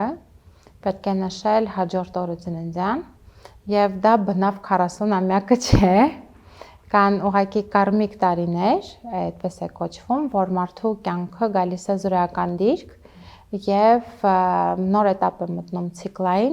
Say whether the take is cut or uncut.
uncut